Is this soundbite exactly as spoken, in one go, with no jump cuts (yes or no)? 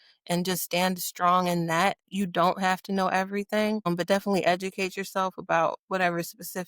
no